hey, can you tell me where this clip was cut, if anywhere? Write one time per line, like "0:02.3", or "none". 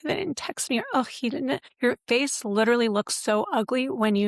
0:01.7